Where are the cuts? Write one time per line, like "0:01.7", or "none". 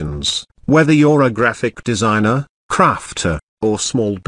none